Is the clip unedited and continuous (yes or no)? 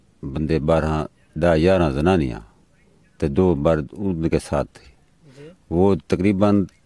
yes